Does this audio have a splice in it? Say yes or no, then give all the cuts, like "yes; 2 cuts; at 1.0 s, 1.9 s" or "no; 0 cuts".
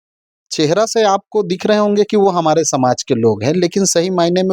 no; 0 cuts